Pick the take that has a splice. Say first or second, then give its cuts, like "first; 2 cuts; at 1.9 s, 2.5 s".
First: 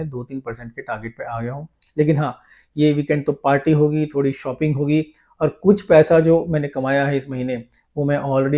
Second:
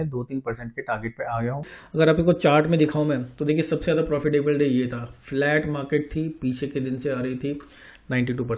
second; 1 cut; at 1.8 s